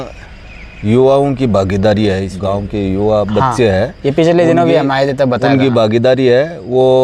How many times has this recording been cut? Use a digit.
1